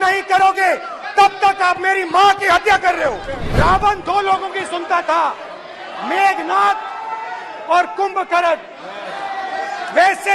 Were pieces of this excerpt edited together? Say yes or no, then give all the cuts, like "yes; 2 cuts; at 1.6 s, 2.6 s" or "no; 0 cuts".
yes; 1 cut; at 3.4 s